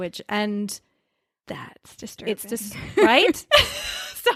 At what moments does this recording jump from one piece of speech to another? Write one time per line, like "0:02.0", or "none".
none